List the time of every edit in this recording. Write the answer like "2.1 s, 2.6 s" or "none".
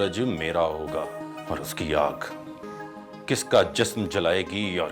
1.3 s